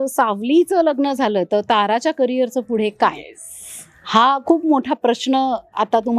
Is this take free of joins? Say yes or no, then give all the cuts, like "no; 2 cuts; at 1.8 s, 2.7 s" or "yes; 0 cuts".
yes; 0 cuts